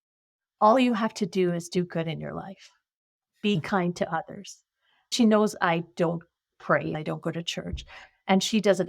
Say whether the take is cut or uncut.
cut